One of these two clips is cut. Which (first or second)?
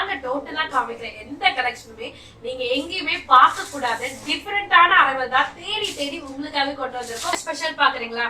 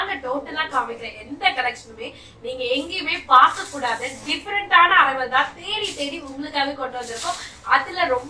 first